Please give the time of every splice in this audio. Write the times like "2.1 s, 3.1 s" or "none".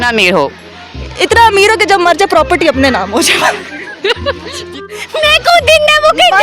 4.8 s